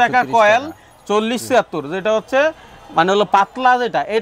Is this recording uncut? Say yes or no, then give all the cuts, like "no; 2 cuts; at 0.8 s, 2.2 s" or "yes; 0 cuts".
yes; 0 cuts